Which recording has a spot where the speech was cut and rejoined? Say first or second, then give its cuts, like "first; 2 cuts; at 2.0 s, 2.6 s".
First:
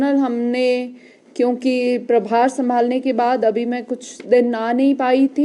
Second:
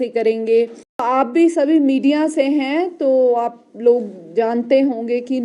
second; 1 cut; at 1.0 s